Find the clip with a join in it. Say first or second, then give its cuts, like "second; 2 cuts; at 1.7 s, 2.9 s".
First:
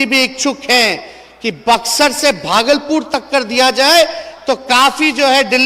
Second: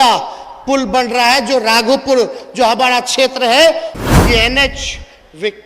second; 1 cut; at 3.9 s